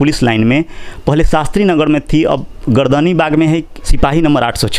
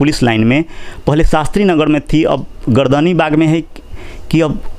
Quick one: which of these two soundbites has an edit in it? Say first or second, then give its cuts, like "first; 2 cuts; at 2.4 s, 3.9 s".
first; 1 cut; at 3.8 s